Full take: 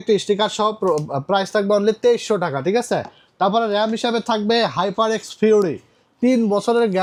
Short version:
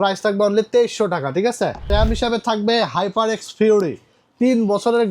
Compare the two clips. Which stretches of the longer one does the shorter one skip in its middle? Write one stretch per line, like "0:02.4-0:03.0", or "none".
0:03.2-0:03.7